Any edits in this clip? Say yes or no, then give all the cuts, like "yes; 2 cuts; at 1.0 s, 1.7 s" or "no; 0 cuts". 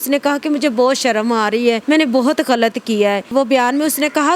yes; 1 cut; at 1.8 s